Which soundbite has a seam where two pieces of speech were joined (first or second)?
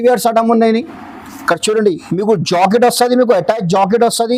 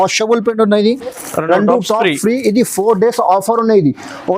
second